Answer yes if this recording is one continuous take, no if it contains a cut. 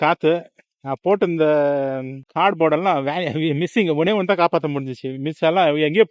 yes